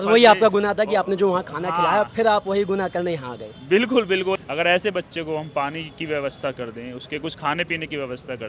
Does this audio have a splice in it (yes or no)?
yes